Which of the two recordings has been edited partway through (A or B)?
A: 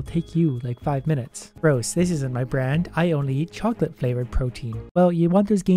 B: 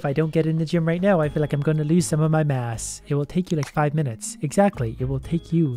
A